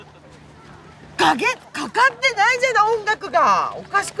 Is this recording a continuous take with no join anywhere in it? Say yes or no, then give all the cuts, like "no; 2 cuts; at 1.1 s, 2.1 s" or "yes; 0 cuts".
yes; 0 cuts